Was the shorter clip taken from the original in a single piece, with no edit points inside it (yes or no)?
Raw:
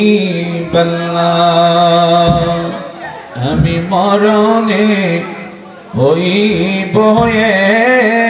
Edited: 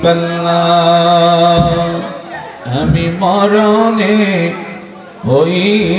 yes